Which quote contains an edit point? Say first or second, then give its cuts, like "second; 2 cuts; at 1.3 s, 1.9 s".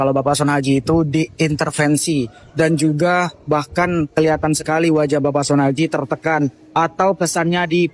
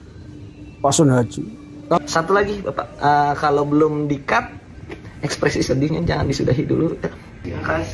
second; 1 cut; at 2.0 s